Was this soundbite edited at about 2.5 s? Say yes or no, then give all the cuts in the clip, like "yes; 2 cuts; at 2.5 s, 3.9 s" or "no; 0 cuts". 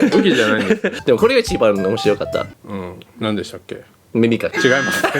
no; 1 cut; at 1.0 s